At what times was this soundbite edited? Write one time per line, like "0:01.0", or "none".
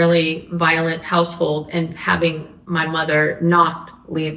0:02.5